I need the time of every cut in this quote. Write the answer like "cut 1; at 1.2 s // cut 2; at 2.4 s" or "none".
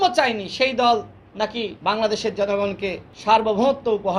cut 1; at 1.7 s // cut 2; at 3.1 s